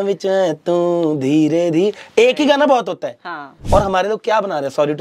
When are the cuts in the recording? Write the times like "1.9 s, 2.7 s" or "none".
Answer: 3.5 s